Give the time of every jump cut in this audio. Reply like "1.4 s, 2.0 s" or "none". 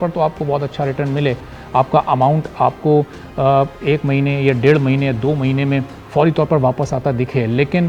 none

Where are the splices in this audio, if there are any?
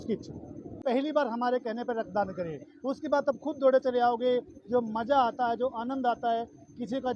1.0 s

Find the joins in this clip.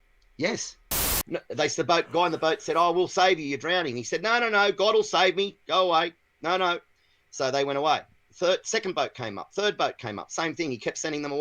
1.0 s

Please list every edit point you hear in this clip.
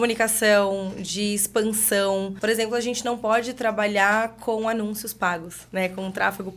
2.3 s, 5.6 s

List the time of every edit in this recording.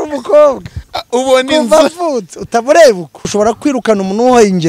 3.3 s

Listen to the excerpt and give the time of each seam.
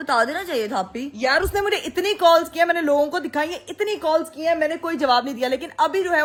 none

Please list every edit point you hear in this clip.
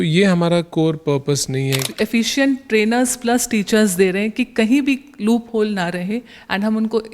1.9 s

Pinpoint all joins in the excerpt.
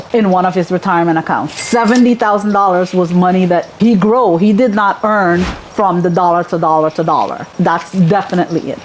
none

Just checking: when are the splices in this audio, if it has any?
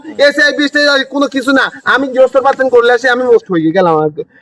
3.5 s

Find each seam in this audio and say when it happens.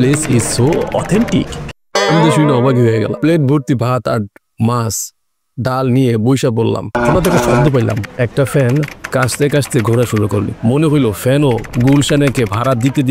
3.1 s, 6.9 s

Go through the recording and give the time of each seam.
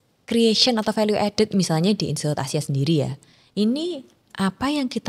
none

